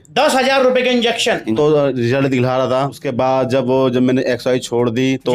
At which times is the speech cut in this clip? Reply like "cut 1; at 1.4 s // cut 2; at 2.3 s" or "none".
cut 1; at 1.5 s // cut 2; at 3.0 s